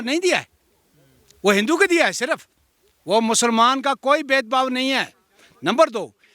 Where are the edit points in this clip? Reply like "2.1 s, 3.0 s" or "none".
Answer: none